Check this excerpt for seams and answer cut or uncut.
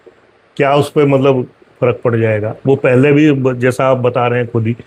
uncut